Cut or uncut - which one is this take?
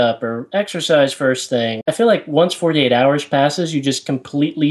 cut